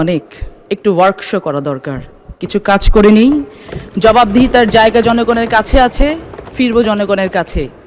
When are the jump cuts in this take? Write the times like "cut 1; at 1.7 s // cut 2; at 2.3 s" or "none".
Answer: none